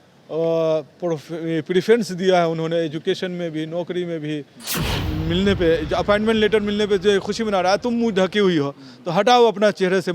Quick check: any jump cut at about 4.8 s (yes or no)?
yes